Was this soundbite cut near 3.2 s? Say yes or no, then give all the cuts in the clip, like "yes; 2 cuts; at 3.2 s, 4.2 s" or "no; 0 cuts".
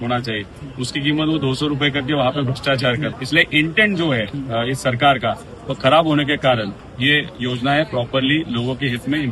yes; 3 cuts; at 3.2 s, 4.4 s, 6.8 s